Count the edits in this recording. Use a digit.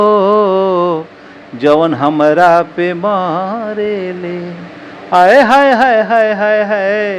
0